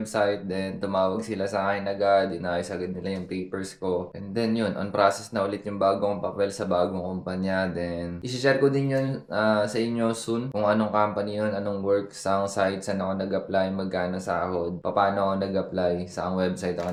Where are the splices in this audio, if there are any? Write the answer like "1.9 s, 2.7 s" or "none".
none